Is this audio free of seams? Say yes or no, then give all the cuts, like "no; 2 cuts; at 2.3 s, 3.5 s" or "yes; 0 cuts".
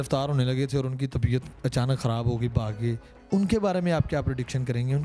yes; 0 cuts